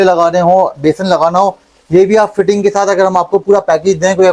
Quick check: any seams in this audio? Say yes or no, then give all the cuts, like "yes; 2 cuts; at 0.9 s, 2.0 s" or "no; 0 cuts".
no; 0 cuts